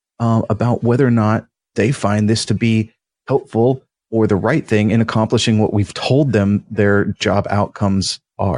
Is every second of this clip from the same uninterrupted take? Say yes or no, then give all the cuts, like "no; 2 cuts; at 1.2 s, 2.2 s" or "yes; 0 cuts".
yes; 0 cuts